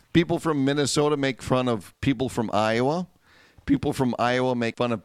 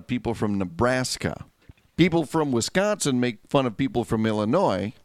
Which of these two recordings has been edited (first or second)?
second